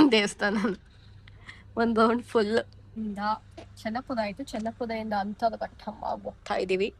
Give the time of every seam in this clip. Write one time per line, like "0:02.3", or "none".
0:03.0